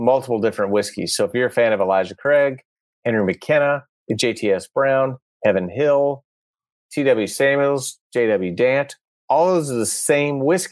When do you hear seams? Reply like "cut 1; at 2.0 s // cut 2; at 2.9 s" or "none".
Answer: cut 1; at 6.7 s